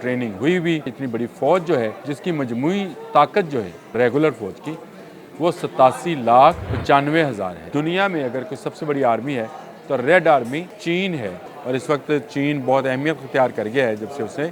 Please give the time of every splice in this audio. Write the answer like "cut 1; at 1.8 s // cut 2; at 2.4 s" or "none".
cut 1; at 1.0 s // cut 2; at 2.1 s // cut 3; at 3.9 s // cut 4; at 6.7 s // cut 5; at 7.6 s // cut 6; at 10.7 s // cut 7; at 11.4 s